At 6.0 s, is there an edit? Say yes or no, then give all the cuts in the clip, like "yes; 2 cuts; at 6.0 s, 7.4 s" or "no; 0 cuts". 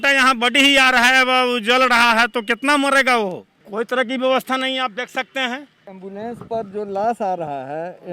yes; 2 cuts; at 3.6 s, 6.0 s